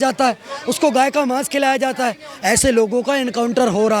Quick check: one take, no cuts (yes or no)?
yes